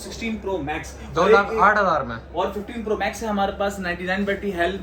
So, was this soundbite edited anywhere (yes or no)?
no